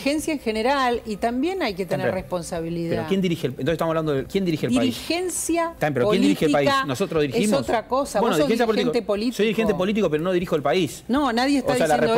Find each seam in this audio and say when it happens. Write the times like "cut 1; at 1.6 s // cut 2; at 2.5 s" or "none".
cut 1; at 4.3 s // cut 2; at 5.7 s